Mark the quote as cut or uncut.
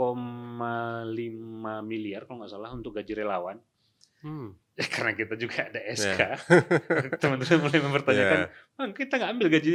uncut